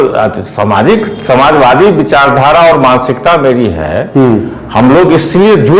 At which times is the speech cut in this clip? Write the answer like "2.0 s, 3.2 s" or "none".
none